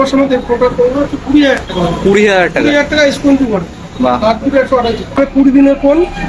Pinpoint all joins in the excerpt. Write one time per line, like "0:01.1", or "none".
0:05.2